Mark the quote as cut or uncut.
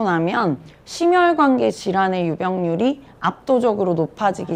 uncut